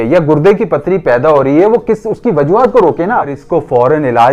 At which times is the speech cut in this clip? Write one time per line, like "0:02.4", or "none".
0:03.4